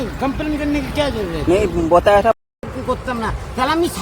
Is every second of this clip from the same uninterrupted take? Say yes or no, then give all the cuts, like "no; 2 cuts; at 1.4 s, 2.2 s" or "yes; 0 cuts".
no; 1 cut; at 2.7 s